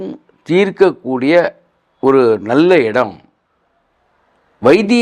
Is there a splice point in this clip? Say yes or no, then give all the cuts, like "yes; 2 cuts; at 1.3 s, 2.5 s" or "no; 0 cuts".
no; 0 cuts